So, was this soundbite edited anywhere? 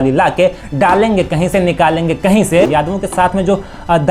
yes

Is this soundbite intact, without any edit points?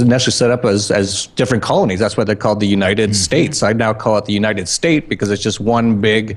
yes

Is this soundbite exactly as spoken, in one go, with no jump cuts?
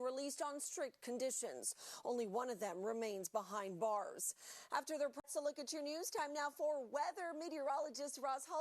no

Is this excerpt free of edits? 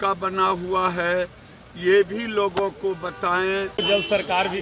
no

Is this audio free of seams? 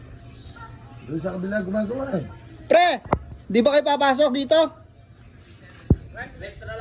yes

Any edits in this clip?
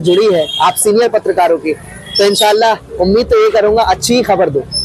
no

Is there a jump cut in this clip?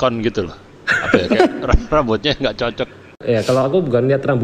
yes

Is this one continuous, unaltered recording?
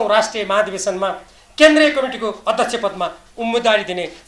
yes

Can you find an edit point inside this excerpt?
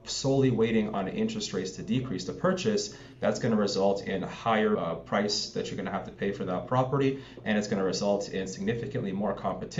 no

